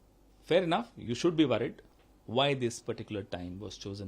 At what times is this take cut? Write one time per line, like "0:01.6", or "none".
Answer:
0:01.9